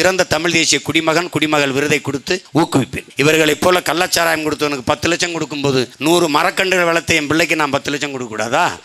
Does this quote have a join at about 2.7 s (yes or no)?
yes